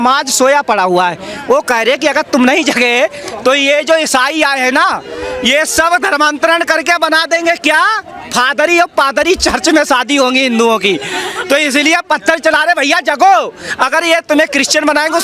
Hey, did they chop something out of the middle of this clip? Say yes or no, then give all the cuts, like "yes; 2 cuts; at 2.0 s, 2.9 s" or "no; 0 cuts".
no; 0 cuts